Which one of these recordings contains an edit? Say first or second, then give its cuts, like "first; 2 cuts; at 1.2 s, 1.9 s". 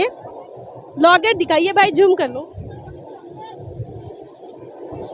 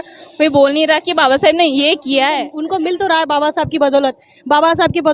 second; 1 cut; at 2.5 s